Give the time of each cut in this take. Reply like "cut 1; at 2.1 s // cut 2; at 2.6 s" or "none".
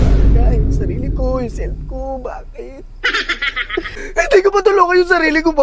cut 1; at 4.0 s